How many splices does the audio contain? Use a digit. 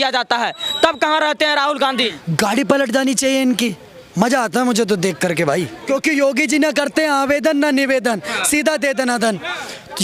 2